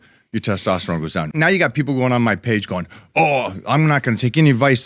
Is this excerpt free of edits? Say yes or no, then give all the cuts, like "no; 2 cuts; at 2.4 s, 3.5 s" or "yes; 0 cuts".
no; 1 cut; at 1.2 s